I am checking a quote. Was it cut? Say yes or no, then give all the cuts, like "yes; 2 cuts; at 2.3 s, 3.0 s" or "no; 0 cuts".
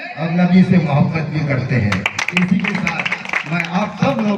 no; 0 cuts